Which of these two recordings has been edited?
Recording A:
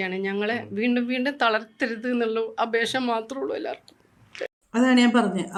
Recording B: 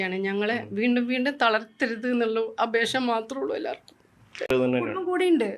B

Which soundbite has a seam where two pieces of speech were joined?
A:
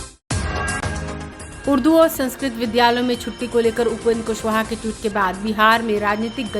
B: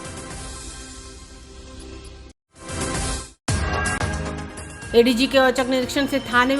A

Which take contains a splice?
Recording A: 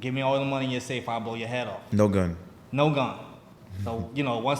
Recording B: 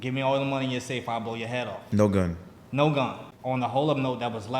B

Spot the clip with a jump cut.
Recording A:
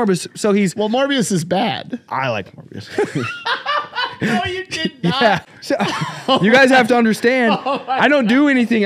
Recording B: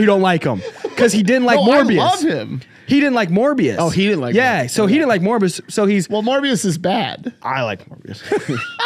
A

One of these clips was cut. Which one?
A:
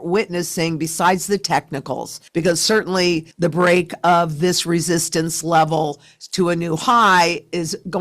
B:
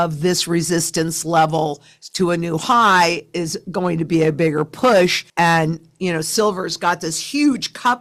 A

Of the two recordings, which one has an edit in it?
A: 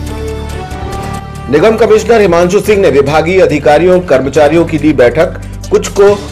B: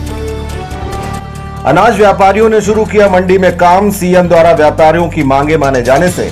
A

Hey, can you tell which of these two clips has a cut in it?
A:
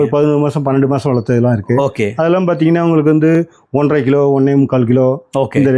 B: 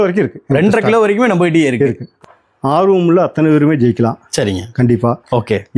B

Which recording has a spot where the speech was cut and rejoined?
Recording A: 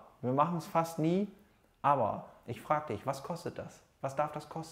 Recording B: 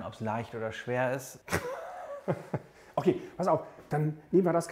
B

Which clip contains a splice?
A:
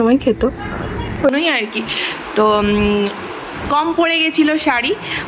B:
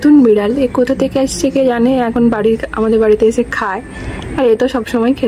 A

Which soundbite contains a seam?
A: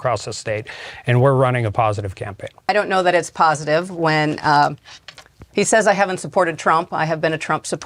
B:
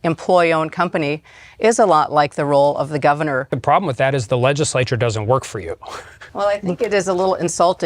B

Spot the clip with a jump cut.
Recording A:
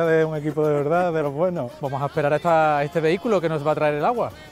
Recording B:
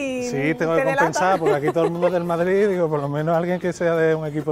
A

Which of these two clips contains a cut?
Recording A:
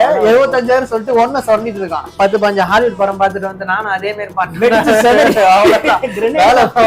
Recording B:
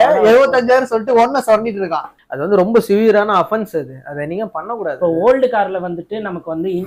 A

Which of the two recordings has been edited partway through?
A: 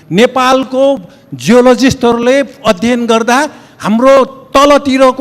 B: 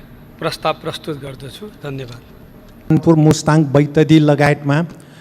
B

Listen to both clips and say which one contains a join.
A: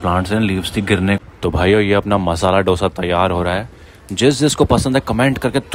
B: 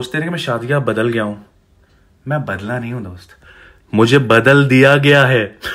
A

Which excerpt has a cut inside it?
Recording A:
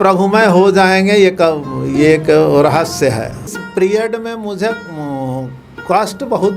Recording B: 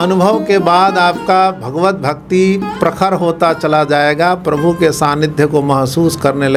A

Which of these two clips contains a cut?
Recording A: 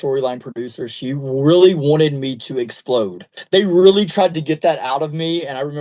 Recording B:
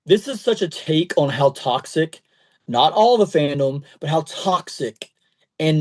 A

